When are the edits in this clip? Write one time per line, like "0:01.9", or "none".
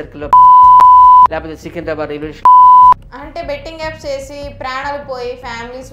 0:03.1